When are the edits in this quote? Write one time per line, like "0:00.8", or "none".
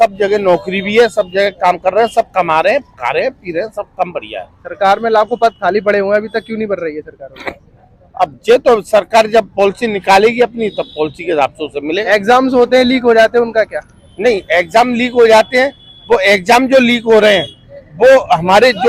none